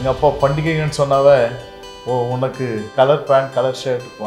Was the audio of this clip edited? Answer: no; 0 cuts

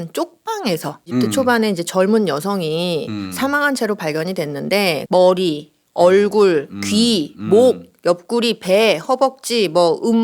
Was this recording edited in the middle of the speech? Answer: yes; 2 cuts; at 1.1 s, 5.0 s

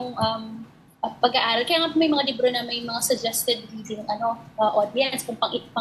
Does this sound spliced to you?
no; 0 cuts

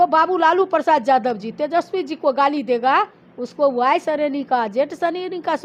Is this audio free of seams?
yes; 0 cuts

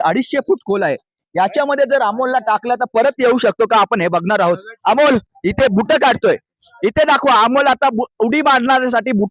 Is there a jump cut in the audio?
no; 0 cuts

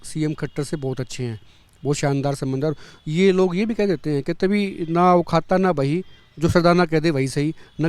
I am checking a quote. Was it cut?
no; 0 cuts

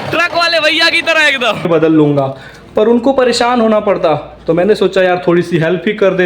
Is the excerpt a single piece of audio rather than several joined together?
no; 1 cut; at 1.7 s

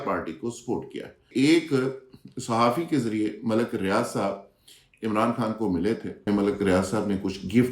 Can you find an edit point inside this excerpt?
yes; 2 cuts; at 1.3 s, 6.2 s

